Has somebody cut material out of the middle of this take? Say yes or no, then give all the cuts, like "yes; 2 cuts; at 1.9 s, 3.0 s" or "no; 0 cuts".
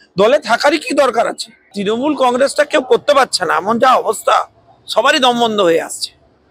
yes; 1 cut; at 1.7 s